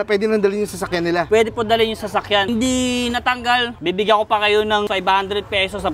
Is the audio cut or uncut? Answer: cut